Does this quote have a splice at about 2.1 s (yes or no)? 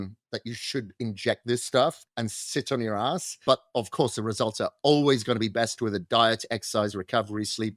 yes